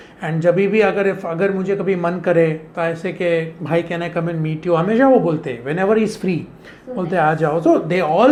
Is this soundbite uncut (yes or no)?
yes